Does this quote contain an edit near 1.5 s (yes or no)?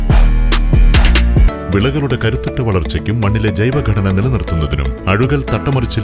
yes